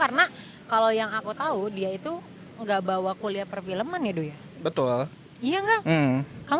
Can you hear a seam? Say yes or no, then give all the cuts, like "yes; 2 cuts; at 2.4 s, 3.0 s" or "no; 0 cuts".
no; 0 cuts